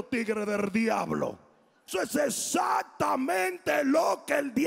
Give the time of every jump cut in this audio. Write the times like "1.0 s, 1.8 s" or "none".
1.9 s